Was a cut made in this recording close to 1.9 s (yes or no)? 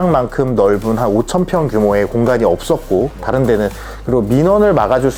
no